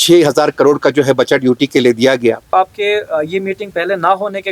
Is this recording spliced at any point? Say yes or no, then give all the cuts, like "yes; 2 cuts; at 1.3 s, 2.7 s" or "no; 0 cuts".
yes; 1 cut; at 2.5 s